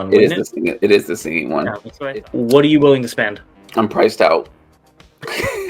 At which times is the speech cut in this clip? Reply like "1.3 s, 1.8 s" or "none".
1.8 s

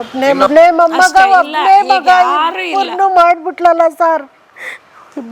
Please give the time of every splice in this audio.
none

